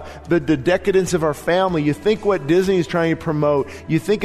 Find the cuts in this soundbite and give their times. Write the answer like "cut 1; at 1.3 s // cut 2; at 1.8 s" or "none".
none